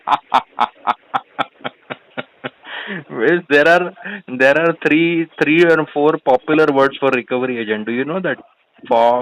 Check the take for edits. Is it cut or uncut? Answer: uncut